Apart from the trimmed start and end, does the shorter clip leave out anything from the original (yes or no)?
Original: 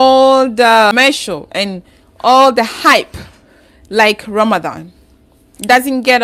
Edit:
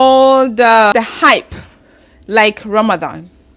yes